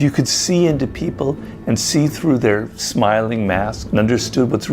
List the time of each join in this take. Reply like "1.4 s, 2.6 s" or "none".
3.8 s